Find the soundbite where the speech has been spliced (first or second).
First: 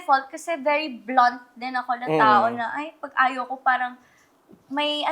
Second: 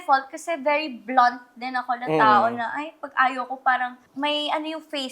second